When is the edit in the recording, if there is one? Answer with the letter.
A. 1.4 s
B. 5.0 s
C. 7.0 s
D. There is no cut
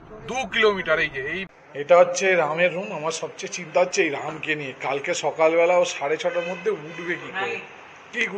A